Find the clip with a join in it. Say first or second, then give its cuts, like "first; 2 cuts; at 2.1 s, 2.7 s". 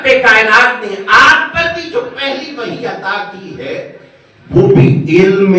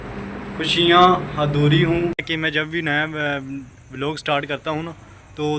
second; 1 cut; at 2.3 s